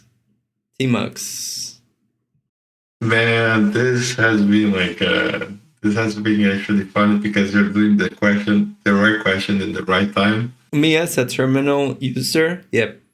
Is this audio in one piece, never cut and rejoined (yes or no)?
no